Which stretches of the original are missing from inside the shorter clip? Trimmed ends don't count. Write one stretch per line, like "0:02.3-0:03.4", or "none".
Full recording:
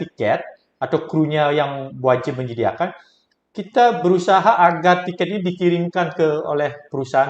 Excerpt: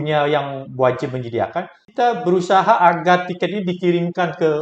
0:03.0-0:03.6

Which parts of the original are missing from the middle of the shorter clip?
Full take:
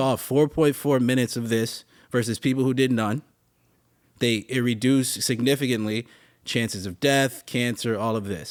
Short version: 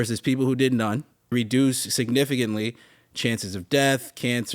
0:03.5-0:04.6

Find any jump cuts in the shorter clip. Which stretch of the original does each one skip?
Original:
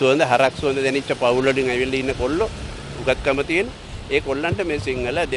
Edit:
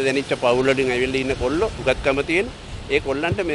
0:02.5-0:03.0

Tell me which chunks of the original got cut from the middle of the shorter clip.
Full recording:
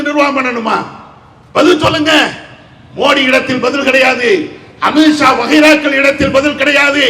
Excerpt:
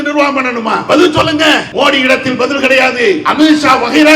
0:00.8-0:01.5
0:02.3-0:02.9
0:04.5-0:04.8

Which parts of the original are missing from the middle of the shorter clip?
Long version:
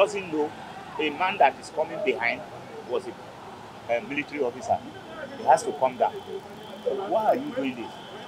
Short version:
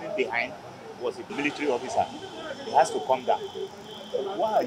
0:03.2-0:04.0

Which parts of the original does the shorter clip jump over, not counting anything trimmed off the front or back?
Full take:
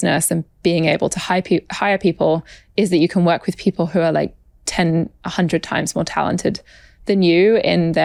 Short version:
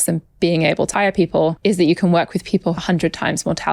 0:01.5-0:02.4
0:03.9-0:05.3

